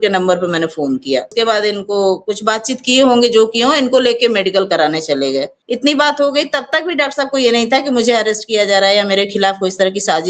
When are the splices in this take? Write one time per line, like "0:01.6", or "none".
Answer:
0:01.3
0:05.6

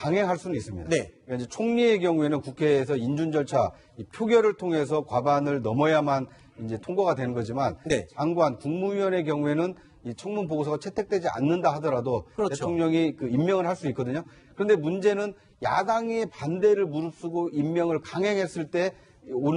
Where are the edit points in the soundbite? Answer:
0:08.6

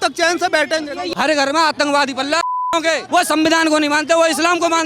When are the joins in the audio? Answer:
0:01.0
0:02.7

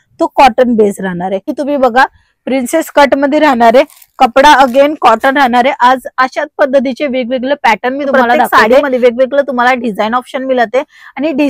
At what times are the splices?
0:01.5
0:08.7

